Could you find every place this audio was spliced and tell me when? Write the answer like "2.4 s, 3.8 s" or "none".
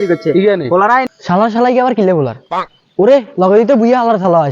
1.1 s